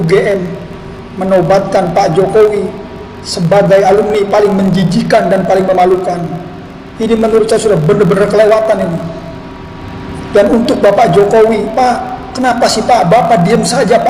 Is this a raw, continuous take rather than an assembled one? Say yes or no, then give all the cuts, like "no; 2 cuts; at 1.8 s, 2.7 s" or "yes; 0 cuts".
yes; 0 cuts